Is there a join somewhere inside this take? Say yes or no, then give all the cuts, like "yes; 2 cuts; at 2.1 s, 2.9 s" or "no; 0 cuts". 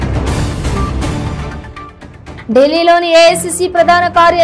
yes; 1 cut; at 1.4 s